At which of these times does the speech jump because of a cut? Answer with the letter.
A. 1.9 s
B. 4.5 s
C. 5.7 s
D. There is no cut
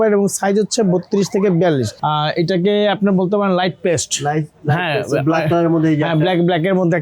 A